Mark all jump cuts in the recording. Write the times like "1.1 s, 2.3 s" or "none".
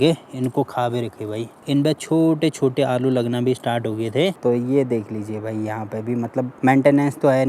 1.6 s, 4.4 s, 6.5 s